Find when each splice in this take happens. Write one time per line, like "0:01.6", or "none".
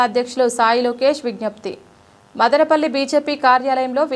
none